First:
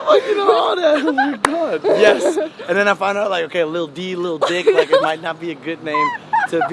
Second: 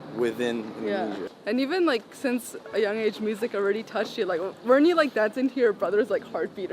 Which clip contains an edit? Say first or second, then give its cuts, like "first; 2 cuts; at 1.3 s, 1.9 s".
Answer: second; 1 cut; at 1.3 s